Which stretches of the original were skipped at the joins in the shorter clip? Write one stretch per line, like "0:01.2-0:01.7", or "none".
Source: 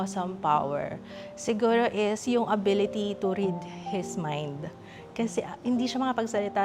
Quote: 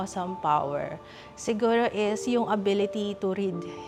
none